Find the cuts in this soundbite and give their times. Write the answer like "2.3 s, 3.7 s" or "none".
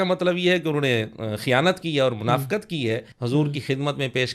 3.1 s